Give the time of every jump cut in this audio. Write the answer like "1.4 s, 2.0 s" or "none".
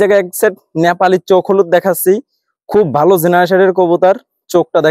none